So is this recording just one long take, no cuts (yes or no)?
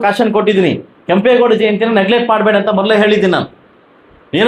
yes